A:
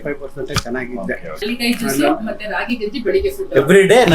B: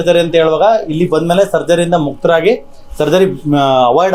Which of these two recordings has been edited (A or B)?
A